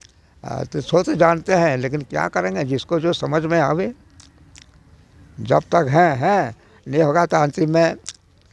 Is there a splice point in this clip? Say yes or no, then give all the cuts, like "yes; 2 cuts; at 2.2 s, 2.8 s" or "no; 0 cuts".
no; 0 cuts